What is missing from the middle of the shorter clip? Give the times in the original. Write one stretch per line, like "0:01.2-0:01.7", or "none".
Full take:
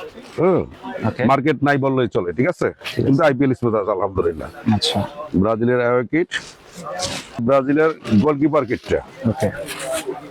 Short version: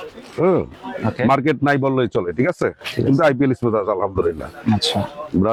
none